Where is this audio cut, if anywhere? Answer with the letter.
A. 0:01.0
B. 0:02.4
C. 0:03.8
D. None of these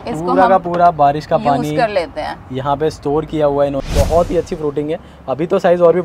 C